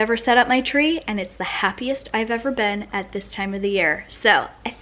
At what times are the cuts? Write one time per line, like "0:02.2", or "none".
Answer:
none